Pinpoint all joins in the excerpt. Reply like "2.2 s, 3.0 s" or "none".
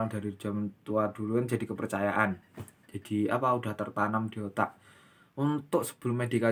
none